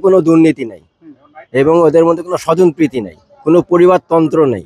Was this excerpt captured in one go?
yes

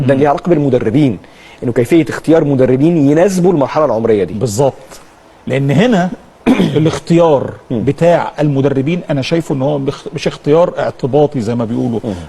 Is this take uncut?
no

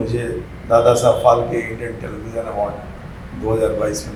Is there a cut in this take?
no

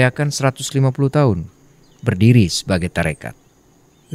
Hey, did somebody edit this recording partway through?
no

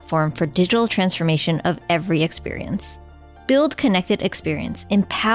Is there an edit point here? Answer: no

